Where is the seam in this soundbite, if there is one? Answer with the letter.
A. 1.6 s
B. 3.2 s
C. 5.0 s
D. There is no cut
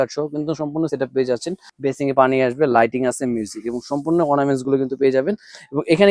A